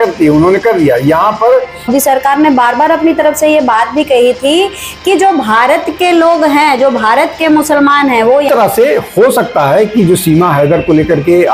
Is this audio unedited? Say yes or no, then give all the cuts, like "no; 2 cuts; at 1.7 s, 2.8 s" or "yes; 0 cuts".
no; 2 cuts; at 1.9 s, 8.5 s